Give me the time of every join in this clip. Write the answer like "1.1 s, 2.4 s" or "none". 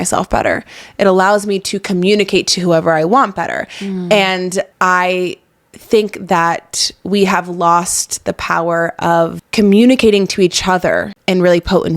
4.7 s, 9.4 s, 11.1 s